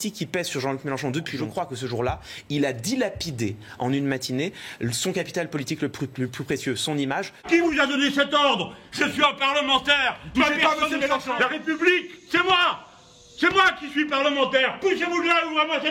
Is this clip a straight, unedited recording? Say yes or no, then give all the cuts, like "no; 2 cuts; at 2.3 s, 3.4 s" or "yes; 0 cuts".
no; 3 cuts; at 1.4 s, 7.4 s, 11.3 s